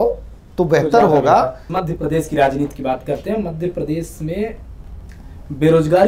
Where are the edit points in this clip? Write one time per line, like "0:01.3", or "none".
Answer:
0:01.7